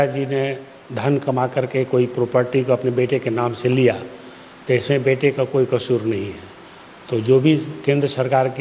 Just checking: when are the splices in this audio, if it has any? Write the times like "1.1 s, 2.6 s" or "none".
none